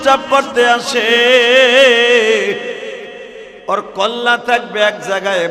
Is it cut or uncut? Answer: uncut